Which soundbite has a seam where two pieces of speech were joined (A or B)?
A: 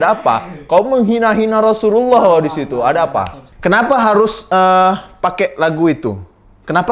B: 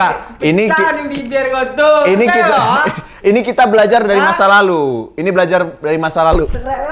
A